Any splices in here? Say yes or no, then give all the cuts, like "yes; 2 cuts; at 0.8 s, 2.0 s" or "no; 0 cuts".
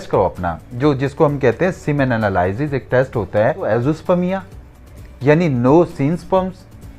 yes; 1 cut; at 3.7 s